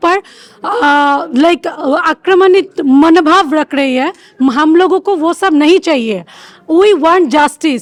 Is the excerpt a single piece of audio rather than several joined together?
yes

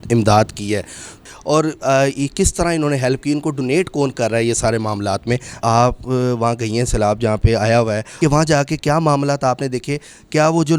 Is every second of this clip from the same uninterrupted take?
no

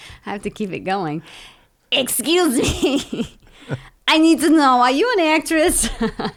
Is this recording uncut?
yes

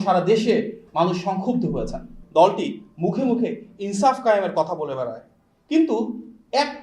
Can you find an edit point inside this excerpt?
yes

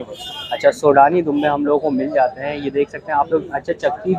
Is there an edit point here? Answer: no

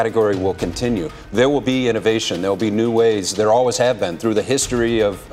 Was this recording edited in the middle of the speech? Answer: no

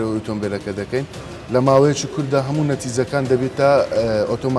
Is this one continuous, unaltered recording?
no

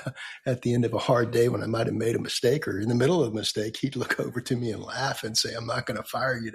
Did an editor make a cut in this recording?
no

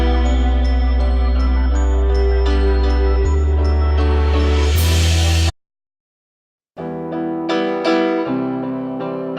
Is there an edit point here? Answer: no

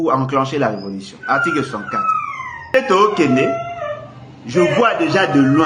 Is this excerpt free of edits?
no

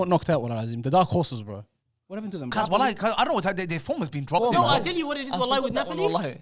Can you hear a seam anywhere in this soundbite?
yes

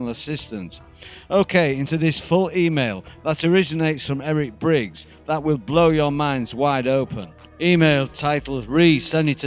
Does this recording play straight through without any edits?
yes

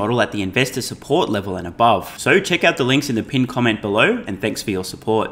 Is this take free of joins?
yes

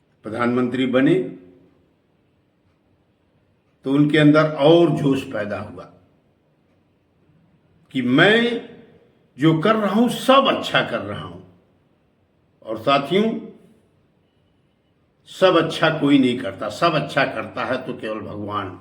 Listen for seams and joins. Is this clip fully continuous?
no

